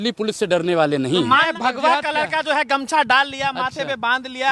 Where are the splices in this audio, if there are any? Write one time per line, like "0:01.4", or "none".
0:01.5

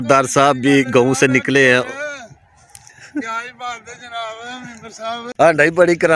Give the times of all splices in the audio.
0:05.3

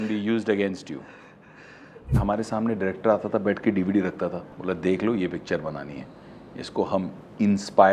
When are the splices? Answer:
0:02.2
0:04.5

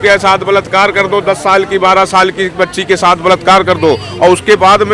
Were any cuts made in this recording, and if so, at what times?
none

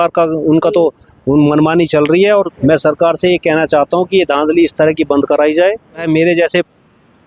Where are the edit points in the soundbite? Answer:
0:02.5
0:06.0

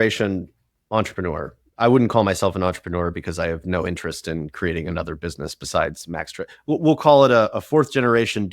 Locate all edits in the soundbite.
0:01.6

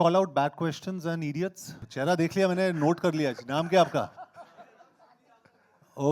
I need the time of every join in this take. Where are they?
0:01.8

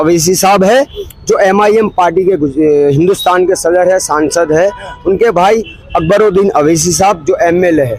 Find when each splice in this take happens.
none

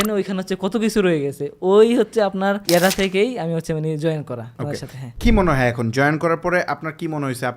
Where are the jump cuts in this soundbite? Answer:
0:02.6
0:04.7

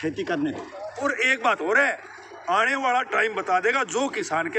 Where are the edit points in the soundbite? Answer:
0:01.0

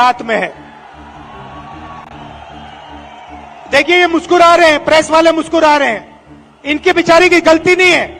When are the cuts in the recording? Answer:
none

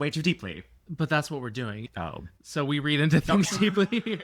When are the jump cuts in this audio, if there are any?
0:01.8

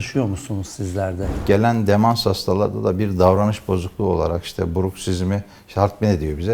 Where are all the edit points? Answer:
0:01.3

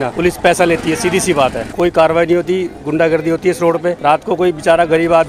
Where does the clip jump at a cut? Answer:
none

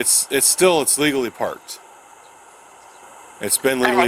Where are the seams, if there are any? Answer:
0:03.0

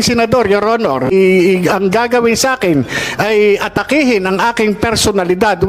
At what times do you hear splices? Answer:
0:01.1

